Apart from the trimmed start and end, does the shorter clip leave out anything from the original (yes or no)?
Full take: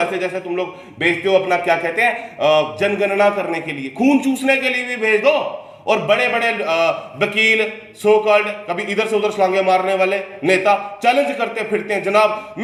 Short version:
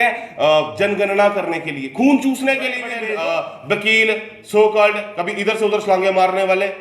yes